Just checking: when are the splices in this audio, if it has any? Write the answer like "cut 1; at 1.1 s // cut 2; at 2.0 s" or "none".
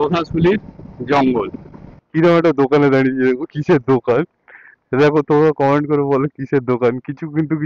cut 1; at 1.9 s